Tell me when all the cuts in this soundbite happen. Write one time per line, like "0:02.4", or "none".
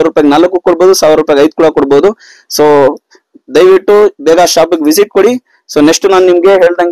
none